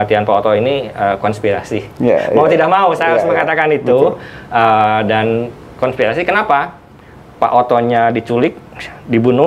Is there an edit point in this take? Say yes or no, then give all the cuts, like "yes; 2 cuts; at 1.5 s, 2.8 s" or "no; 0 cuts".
no; 0 cuts